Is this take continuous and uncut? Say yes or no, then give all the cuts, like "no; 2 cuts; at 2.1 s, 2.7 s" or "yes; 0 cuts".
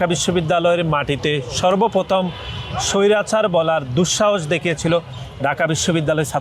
yes; 0 cuts